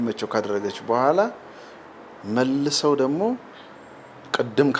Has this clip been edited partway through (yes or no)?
no